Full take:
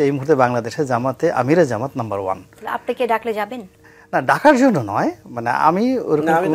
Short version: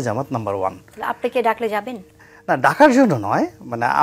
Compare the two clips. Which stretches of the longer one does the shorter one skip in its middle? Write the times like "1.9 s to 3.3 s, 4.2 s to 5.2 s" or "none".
none